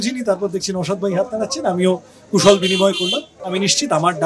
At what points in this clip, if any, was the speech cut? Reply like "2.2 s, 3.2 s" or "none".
3.3 s

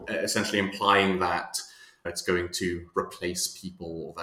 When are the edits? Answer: 2.1 s

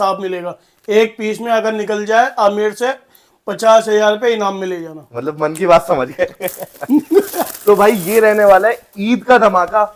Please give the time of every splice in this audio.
none

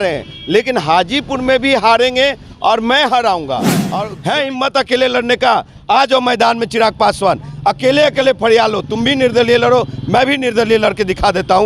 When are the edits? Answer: 3.9 s

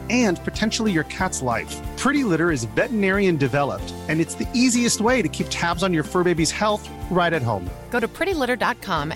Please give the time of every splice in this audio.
none

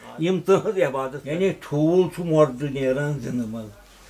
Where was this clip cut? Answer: 1.2 s

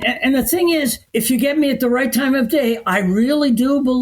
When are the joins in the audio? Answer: 1.0 s

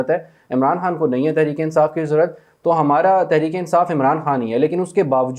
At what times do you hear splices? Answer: none

